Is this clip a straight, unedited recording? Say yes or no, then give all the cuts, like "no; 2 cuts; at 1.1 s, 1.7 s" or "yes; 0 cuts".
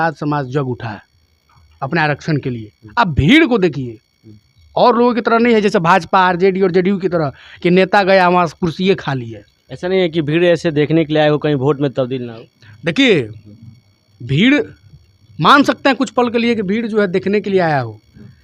yes; 0 cuts